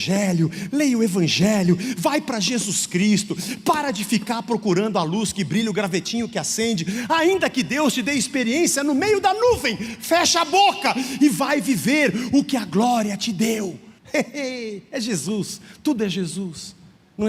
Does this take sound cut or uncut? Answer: cut